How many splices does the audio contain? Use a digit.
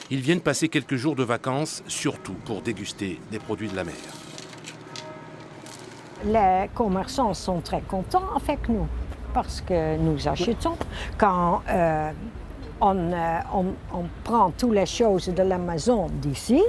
1